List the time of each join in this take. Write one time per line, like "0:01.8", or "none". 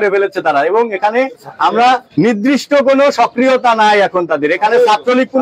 none